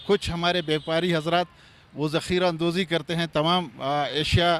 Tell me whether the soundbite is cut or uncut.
uncut